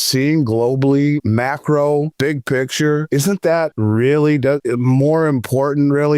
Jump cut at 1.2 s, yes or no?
yes